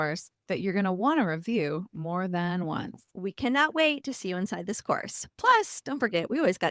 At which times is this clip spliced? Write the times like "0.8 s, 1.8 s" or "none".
3.0 s